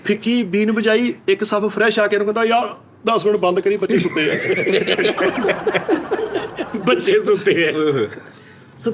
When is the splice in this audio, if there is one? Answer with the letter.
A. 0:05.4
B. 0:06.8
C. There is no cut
C